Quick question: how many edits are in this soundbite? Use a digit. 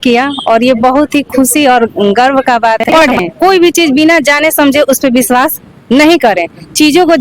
1